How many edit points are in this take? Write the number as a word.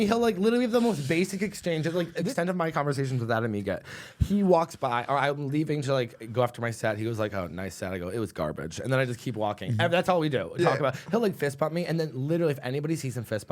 one